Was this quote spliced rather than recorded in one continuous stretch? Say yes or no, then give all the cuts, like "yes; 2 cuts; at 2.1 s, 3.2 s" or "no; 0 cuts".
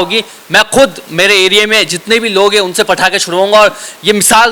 no; 0 cuts